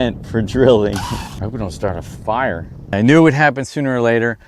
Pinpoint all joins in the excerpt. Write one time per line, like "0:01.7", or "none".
0:01.3
0:02.9